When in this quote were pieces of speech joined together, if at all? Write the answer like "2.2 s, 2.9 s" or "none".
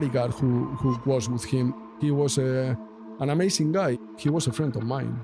1.8 s, 4.0 s